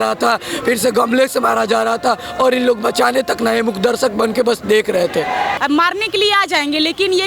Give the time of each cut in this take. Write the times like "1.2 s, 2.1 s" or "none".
5.5 s